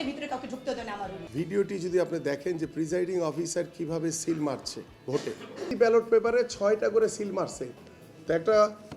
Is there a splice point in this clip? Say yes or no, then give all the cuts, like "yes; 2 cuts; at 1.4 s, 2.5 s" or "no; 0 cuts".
yes; 2 cuts; at 1.2 s, 5.7 s